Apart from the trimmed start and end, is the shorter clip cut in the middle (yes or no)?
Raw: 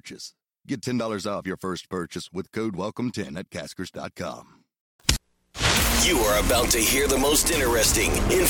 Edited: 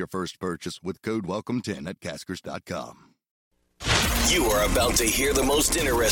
yes